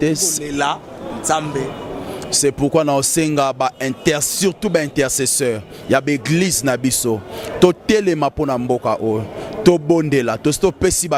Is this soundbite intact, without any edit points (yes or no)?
yes